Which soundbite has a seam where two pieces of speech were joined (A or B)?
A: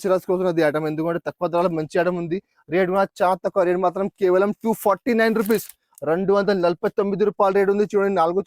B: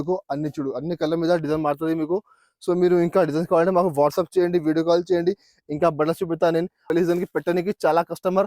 B